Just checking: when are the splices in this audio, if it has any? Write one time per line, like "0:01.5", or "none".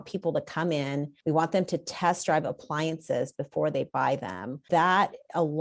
0:01.1
0:04.6

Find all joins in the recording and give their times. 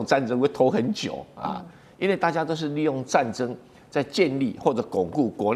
none

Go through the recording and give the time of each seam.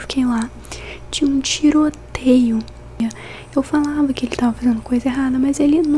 0:03.0

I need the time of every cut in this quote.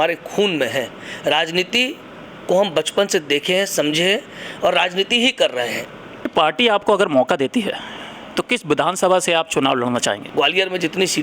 0:06.3
0:10.2

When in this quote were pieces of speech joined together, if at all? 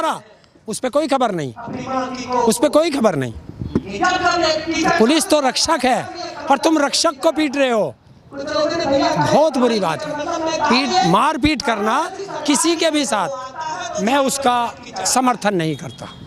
none

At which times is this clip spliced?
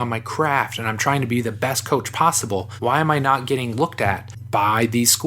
0:02.7
0:04.3

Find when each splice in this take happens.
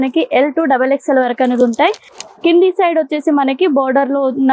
0:01.8

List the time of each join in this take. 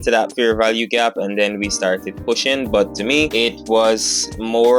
none

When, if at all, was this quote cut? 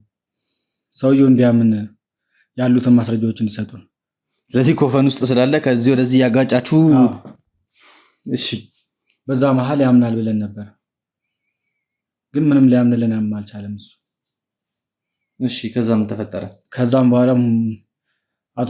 none

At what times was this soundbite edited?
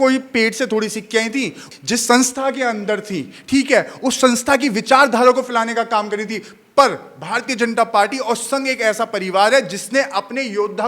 0:01.6

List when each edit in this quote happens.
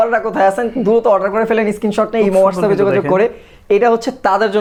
none

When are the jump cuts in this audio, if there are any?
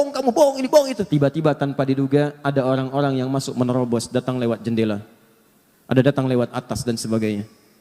0:01.0

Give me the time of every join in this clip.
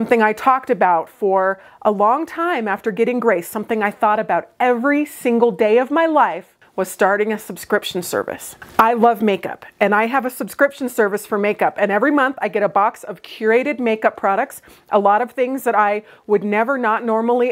none

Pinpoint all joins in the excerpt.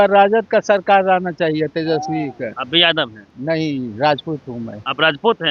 0:02.6
0:03.2

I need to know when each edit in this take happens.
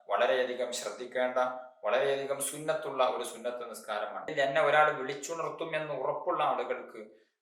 0:04.3

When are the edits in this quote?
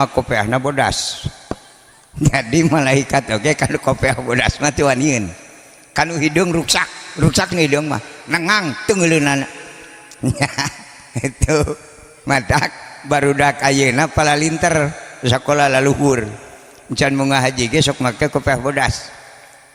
none

